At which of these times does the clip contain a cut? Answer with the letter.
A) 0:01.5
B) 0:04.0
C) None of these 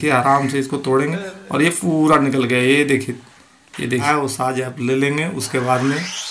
B